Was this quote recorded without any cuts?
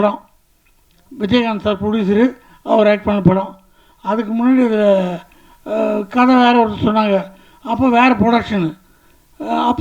yes; 0 cuts

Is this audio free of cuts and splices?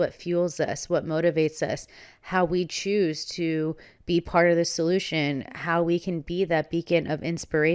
yes; 0 cuts

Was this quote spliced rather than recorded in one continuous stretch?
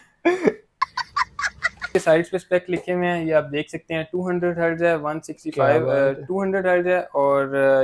yes; 1 cut; at 1.9 s

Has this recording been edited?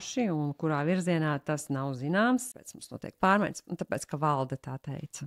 yes; 1 cut; at 2.5 s

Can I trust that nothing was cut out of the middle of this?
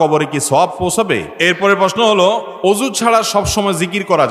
no; 2 cuts; at 1.3 s, 2.5 s

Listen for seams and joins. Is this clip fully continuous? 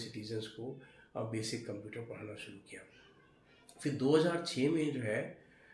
yes; 0 cuts

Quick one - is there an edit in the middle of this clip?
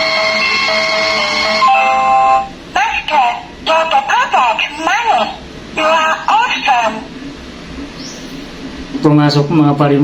no; 0 cuts

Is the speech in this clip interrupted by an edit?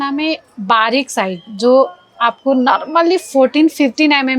no; 0 cuts

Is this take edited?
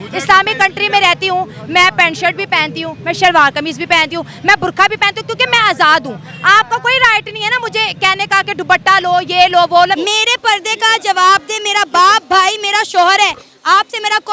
yes; 1 cut; at 10.0 s

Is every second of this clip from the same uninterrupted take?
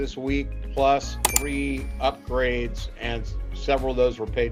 yes; 0 cuts

